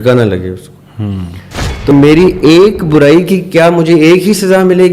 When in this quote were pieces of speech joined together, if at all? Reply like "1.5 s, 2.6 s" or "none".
1.9 s